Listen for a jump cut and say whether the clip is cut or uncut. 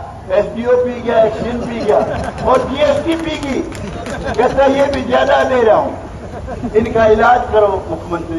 uncut